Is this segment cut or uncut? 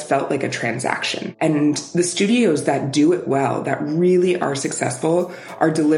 cut